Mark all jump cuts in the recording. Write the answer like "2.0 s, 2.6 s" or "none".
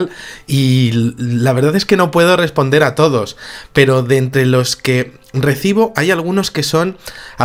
none